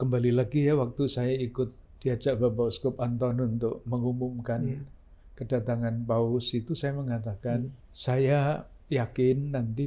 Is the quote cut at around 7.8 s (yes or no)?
yes